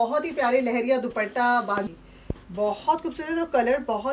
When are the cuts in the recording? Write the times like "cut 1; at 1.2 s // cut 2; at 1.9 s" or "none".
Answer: cut 1; at 1.9 s